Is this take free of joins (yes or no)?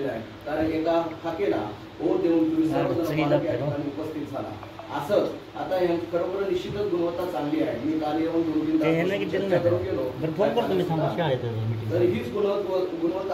yes